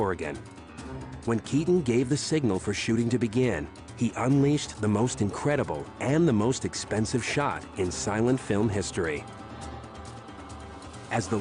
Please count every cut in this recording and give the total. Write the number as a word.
one